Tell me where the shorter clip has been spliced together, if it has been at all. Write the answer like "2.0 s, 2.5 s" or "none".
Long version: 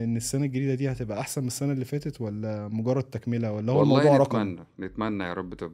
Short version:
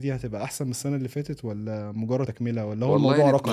2.3 s